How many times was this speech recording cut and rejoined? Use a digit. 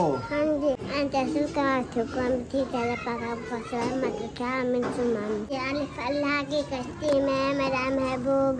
2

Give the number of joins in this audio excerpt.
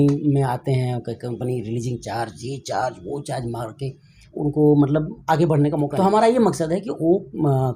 1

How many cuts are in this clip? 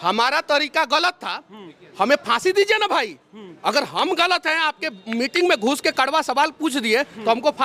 0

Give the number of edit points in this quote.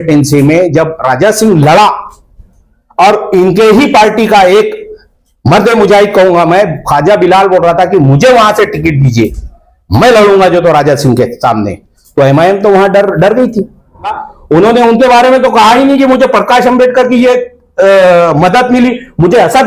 1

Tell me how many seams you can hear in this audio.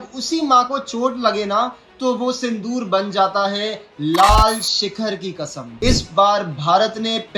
1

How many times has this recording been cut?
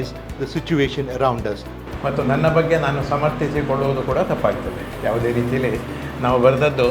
1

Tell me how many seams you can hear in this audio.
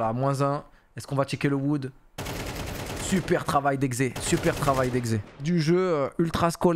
1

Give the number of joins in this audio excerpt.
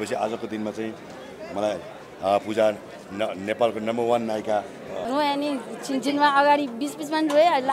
1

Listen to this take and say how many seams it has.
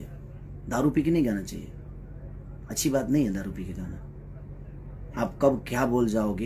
0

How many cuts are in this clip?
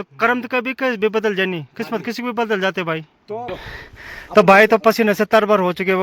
1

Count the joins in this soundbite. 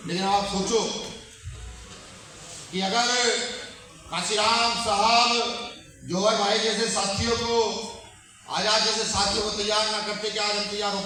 0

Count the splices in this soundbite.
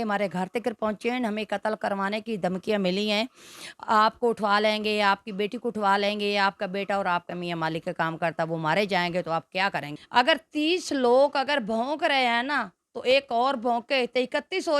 1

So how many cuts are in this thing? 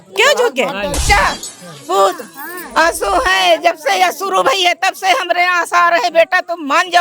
1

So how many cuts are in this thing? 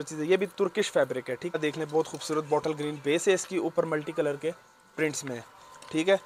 1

